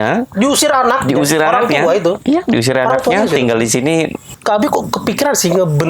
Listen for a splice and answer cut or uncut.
cut